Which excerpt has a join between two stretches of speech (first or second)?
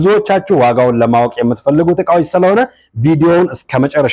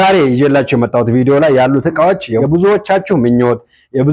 second